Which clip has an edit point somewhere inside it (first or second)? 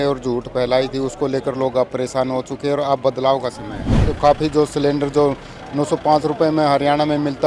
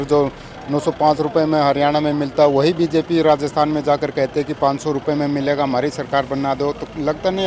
first